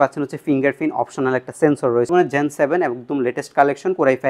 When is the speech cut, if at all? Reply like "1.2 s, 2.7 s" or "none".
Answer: 2.1 s